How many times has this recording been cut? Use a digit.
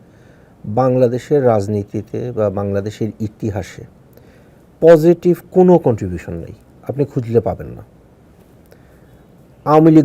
1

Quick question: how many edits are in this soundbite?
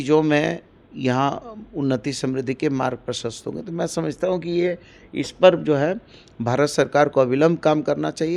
0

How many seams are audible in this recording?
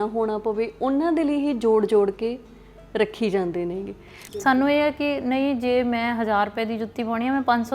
1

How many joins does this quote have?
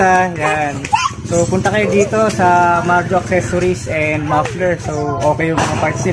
0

